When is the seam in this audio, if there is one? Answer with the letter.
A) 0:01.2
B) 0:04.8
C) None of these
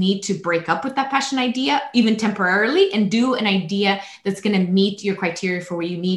C